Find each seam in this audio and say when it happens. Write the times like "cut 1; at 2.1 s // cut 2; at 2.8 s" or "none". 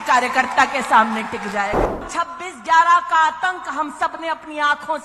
cut 1; at 2.1 s